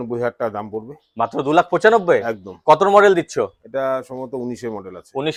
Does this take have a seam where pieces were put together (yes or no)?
no